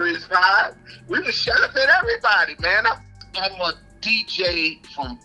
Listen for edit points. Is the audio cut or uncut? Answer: cut